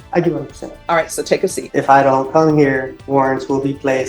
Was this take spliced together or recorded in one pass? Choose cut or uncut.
cut